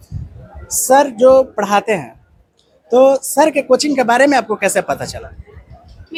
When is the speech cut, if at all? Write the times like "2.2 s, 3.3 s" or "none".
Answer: none